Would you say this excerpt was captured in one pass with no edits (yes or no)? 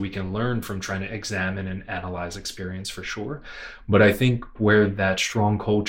no